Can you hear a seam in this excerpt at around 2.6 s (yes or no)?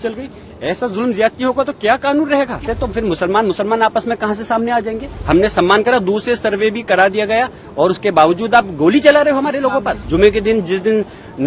yes